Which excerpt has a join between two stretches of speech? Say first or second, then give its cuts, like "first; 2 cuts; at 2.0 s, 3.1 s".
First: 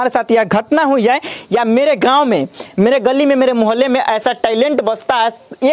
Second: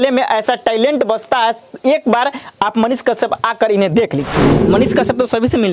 second; 1 cut; at 4.3 s